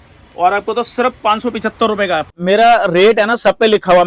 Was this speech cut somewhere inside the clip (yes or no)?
yes